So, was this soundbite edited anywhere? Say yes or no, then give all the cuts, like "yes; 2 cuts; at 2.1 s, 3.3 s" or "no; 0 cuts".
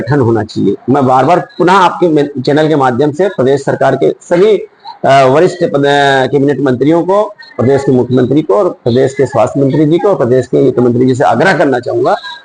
no; 0 cuts